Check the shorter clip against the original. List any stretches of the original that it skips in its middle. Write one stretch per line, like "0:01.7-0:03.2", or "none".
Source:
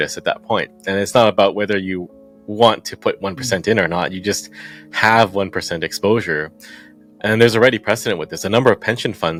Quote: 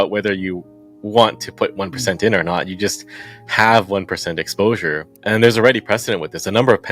0:06.5-0:07.1